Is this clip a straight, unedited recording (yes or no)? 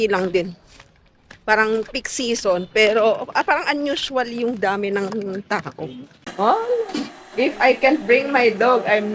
no